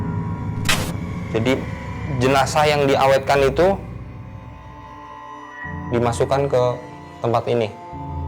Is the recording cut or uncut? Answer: cut